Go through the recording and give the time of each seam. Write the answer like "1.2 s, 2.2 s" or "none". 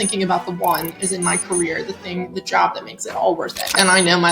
3.4 s